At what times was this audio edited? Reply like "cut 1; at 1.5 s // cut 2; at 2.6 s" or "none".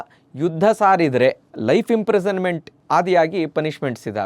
cut 1; at 1.5 s